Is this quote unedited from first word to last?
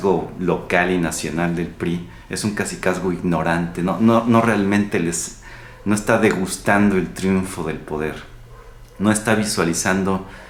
yes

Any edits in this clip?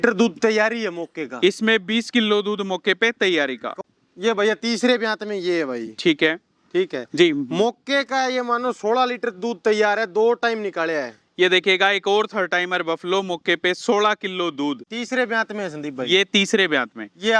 yes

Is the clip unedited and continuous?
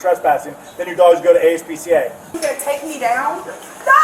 no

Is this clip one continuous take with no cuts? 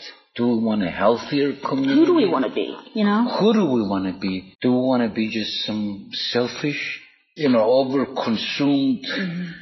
no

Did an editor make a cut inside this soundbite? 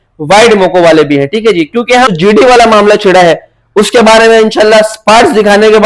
yes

